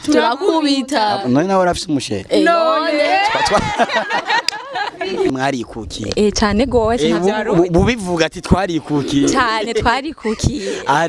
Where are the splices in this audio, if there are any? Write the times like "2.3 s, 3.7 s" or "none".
5.3 s